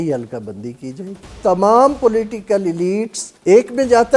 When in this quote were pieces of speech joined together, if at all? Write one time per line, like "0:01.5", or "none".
0:01.4
0:03.3